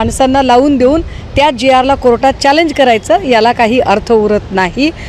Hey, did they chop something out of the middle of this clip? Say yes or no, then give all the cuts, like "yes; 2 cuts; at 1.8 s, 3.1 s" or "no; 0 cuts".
no; 0 cuts